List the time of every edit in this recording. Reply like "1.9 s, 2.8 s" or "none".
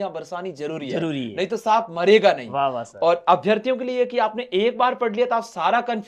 none